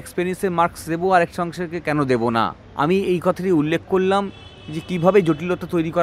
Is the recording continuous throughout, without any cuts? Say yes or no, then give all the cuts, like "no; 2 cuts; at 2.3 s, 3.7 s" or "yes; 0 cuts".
no; 1 cut; at 2.6 s